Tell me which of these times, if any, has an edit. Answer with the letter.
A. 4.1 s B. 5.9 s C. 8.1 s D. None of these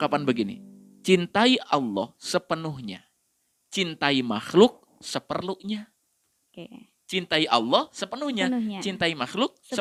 D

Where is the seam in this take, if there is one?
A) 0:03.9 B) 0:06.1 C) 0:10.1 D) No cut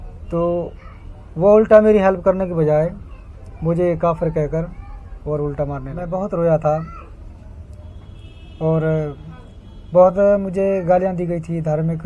B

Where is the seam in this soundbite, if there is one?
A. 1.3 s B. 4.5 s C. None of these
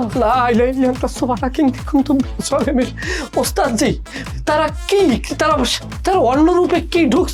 C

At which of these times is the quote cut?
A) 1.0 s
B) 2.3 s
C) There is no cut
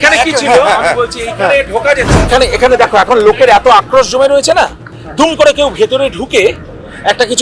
B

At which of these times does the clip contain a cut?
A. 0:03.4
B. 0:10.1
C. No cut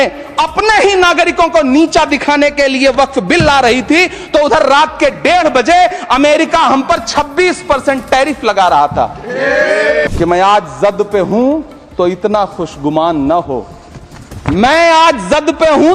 B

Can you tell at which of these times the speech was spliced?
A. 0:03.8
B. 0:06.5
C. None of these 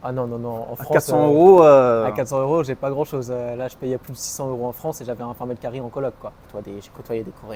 B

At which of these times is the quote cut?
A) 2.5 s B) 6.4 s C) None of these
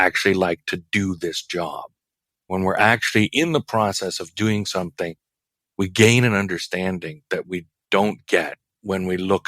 A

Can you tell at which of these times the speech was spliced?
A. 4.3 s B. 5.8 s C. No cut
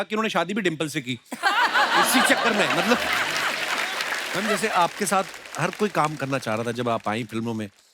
A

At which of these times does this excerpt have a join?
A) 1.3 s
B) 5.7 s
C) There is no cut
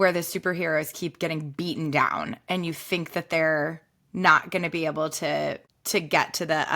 B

